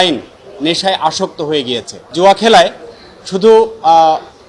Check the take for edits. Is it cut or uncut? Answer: cut